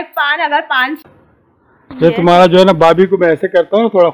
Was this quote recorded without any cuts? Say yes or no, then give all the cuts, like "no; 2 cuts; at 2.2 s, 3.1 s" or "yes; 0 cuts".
no; 1 cut; at 1.0 s